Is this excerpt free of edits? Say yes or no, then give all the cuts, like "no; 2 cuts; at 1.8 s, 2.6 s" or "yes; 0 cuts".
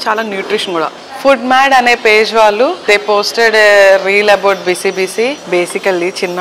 no; 3 cuts; at 1.0 s, 2.8 s, 5.4 s